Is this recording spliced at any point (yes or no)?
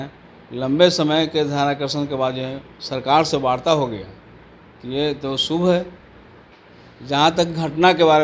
no